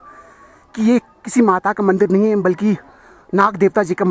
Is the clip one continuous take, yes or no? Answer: yes